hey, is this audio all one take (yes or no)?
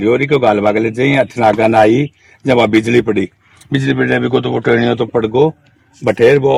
yes